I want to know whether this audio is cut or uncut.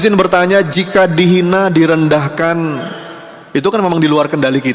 uncut